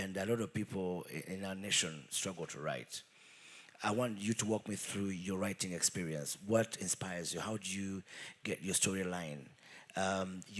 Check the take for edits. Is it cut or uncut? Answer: uncut